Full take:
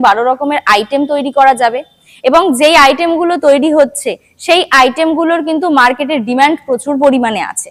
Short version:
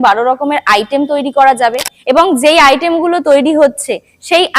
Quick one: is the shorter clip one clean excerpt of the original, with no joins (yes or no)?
no